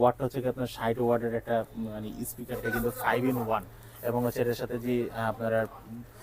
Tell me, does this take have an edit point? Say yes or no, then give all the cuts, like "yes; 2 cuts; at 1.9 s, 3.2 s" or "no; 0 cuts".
yes; 1 cut; at 2.5 s